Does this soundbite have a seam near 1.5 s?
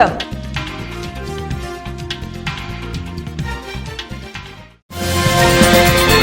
no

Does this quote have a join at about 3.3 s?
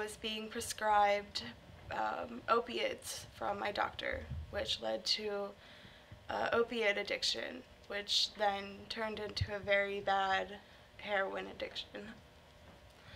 no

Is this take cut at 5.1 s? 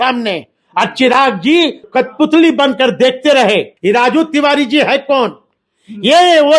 no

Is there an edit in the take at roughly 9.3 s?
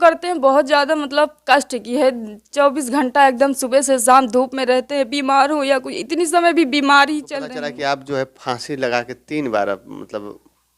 no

